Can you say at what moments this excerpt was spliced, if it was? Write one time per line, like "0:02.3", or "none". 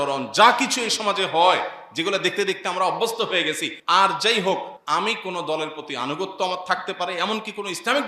0:03.7
0:04.7